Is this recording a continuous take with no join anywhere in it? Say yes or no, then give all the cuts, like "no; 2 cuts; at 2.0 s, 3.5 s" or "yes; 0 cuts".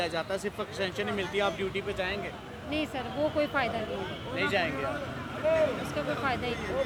yes; 0 cuts